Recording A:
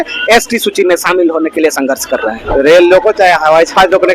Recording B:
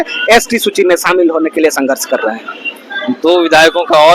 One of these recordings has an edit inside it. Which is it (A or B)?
A